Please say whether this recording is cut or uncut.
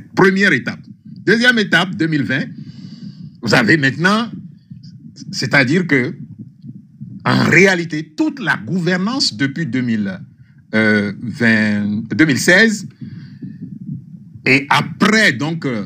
uncut